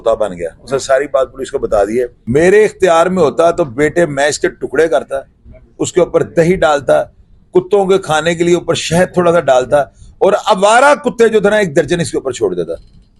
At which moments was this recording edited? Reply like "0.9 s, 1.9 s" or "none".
2.2 s